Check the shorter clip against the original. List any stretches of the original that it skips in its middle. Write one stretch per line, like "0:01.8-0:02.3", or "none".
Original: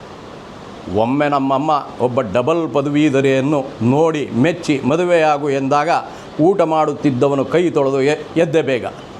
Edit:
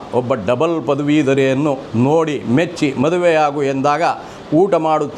none